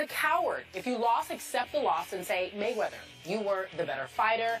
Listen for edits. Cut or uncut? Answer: cut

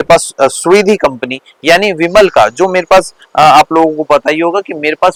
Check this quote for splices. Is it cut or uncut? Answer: uncut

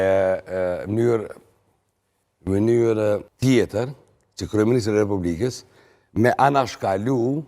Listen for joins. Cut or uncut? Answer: cut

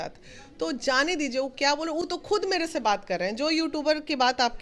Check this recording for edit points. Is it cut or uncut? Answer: uncut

